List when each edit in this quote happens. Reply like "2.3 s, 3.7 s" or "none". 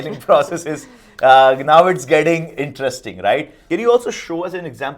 3.5 s